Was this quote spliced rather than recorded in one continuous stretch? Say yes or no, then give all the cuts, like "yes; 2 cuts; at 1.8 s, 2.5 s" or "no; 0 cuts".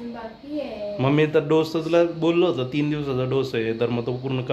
no; 0 cuts